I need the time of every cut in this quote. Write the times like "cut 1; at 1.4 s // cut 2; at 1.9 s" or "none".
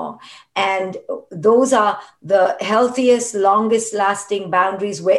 none